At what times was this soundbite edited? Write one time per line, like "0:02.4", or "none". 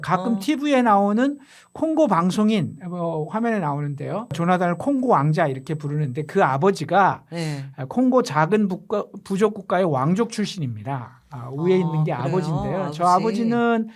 0:04.4

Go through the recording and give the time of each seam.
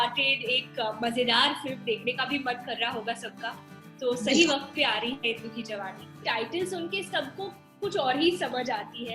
0:06.2

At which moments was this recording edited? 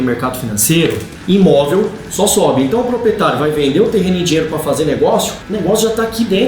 0:01.1
0:05.4

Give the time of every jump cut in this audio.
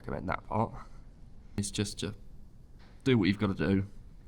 0:01.6

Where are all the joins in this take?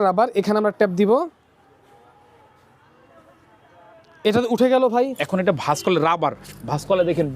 0:05.2

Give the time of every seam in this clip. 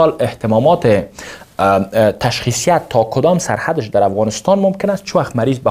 none

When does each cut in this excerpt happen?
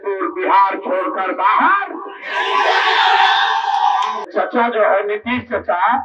0:04.2

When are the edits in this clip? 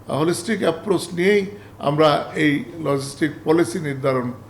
none

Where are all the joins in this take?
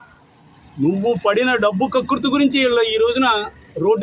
none

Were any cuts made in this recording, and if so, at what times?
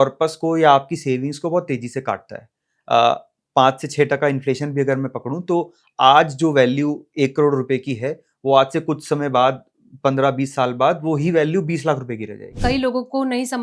0:12.6

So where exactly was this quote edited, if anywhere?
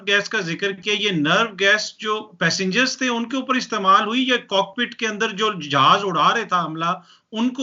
none

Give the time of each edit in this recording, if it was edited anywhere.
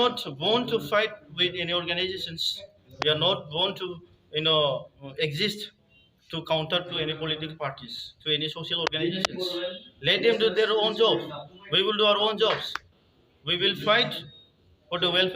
0:05.0

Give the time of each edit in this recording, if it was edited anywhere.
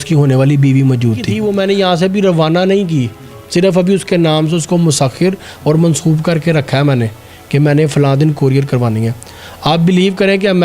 0:01.3

